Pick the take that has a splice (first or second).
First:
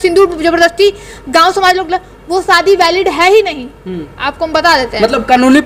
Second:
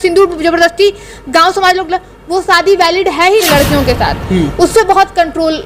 second